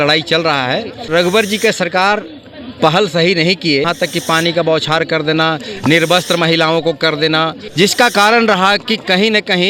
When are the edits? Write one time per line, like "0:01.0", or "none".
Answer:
0:01.0
0:03.9
0:07.6